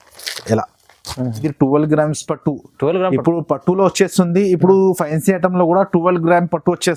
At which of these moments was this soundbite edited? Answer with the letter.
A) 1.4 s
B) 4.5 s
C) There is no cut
A